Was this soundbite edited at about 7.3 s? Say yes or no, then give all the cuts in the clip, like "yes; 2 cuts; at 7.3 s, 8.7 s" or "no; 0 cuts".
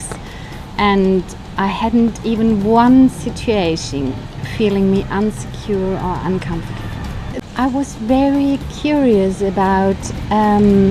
yes; 1 cut; at 7.3 s